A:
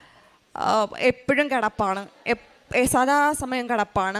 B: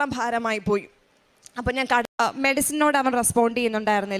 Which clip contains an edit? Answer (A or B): B